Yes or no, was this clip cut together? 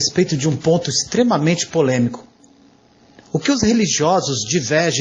no